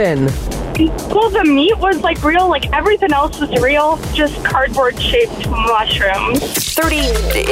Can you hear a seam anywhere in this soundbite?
yes; 1 cut; at 6.5 s

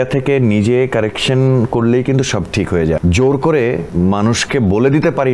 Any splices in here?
yes; 2 cuts; at 3.0 s, 3.9 s

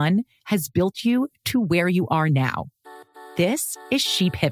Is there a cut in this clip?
no; 0 cuts

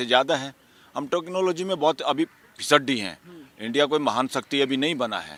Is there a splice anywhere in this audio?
no; 0 cuts

